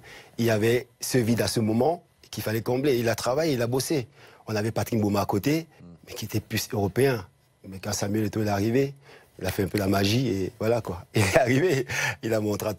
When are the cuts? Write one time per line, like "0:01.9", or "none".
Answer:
0:01.1